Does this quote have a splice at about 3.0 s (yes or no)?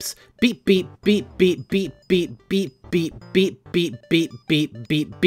yes